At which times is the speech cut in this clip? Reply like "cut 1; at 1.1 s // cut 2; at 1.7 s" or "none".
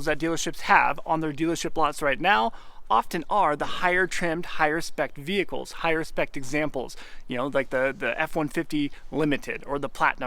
none